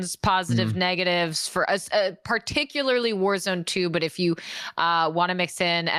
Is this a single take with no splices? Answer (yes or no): yes